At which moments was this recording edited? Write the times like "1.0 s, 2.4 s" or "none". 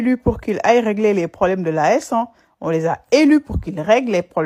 none